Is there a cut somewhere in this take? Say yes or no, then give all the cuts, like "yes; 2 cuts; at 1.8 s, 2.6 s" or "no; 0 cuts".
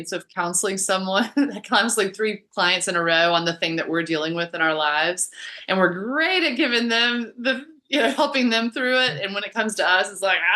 no; 0 cuts